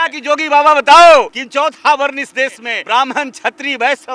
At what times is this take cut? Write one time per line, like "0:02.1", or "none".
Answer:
0:01.4
0:02.7